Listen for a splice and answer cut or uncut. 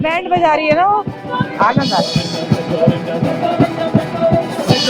uncut